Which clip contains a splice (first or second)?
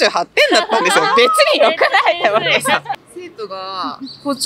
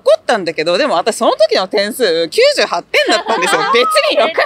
first